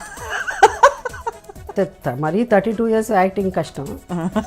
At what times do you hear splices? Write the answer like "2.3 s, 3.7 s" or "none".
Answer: 1.7 s

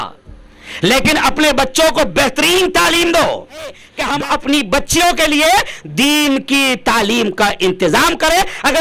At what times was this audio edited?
3.9 s

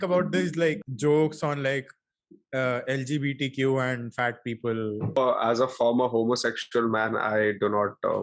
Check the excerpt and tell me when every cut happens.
0.9 s, 5.2 s

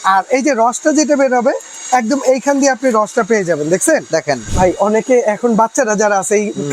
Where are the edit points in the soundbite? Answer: 4.5 s

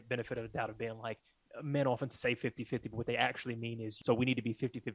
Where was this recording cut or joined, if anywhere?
3.9 s

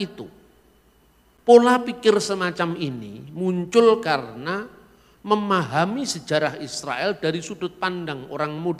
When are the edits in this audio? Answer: 1.3 s

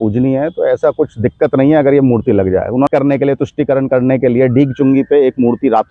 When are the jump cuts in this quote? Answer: 2.9 s

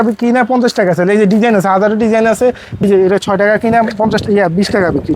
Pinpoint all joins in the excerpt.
2.8 s

